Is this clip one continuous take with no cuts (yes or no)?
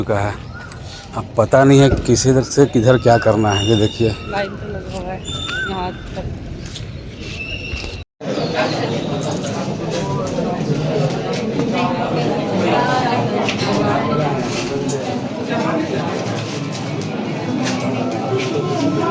yes